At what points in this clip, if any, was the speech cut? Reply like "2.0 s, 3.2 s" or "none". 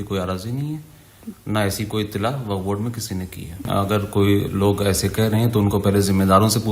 3.6 s